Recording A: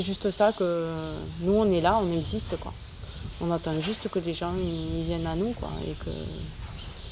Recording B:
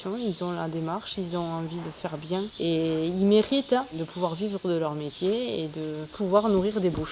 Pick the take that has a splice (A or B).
B